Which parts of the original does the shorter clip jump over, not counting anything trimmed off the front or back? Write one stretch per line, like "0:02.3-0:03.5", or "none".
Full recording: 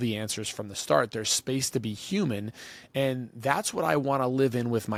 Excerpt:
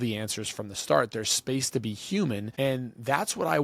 0:02.5-0:02.8